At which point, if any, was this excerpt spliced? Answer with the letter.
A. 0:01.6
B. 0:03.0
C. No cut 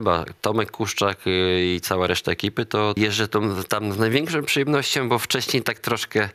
B